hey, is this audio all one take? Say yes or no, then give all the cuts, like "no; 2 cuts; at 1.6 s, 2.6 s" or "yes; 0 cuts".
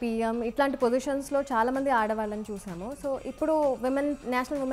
yes; 0 cuts